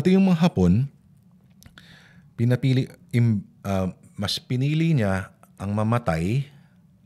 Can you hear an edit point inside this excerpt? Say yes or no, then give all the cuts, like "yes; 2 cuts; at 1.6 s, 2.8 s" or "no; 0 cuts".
no; 0 cuts